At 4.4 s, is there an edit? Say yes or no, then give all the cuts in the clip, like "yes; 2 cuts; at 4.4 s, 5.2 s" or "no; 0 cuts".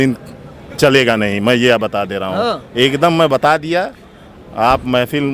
no; 0 cuts